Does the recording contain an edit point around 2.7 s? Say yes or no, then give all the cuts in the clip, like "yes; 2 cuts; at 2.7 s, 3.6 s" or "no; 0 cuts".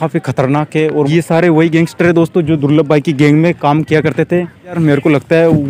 no; 2 cuts; at 1.1 s, 4.8 s